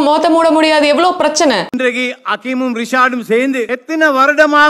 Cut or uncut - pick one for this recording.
cut